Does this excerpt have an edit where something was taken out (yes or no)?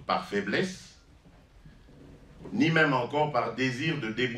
no